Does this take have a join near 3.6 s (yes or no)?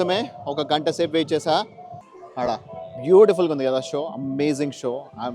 no